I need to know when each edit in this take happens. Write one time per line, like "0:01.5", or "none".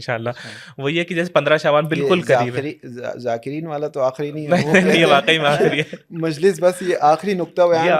none